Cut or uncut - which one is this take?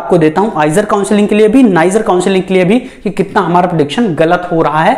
uncut